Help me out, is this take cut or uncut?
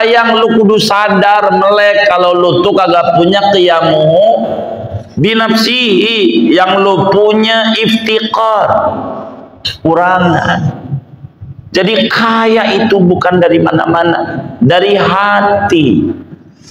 cut